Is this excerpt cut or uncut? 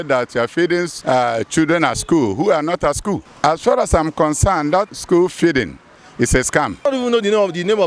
cut